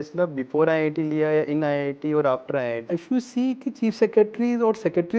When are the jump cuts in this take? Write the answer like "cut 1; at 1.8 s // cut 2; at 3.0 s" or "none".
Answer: cut 1; at 2.8 s

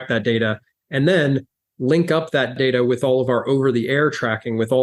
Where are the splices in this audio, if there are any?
cut 1; at 2.5 s

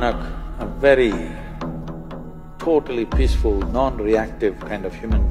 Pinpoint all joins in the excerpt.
none

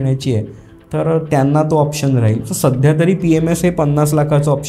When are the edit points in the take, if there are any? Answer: none

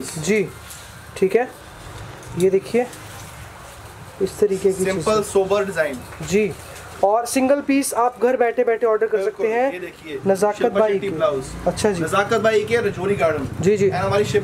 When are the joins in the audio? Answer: none

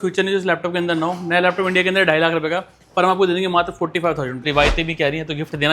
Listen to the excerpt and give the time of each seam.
cut 1; at 4.5 s

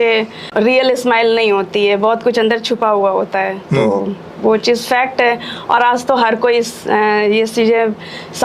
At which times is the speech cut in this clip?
none

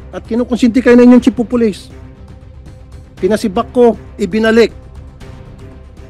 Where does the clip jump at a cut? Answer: cut 1; at 1.8 s // cut 2; at 3.2 s

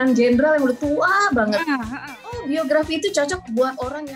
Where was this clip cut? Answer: cut 1; at 2.4 s

